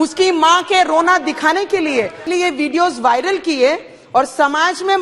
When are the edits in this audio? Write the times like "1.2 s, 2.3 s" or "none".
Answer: 2.2 s